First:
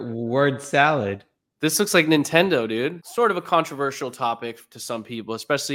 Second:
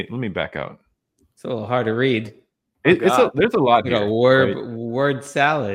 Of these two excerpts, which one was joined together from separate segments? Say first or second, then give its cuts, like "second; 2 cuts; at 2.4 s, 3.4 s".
first; 1 cut; at 3.0 s